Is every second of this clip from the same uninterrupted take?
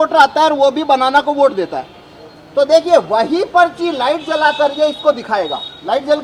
yes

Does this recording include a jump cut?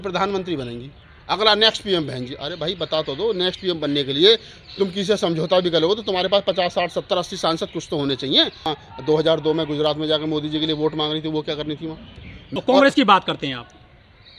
yes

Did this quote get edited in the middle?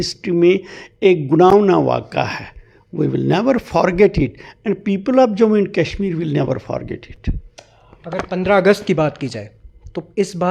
no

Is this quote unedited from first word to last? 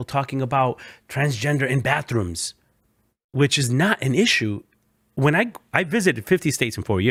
yes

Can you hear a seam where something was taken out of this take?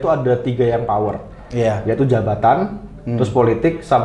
no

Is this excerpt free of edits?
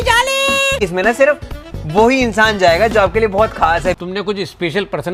no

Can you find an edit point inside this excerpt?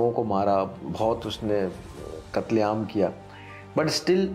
no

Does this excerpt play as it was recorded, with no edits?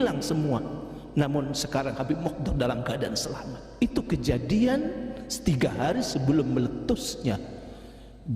no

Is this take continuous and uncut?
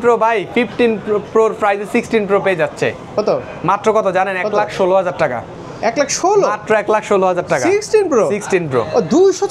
yes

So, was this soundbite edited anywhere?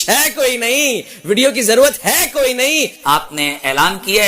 yes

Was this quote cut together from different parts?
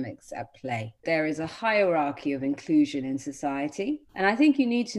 yes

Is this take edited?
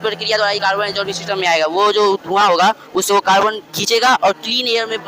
no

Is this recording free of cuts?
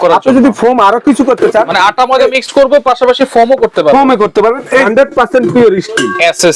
no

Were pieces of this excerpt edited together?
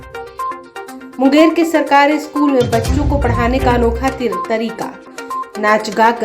yes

